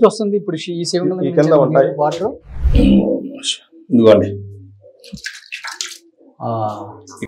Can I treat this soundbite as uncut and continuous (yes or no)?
yes